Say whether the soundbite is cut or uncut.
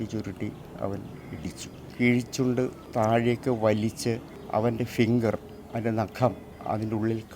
cut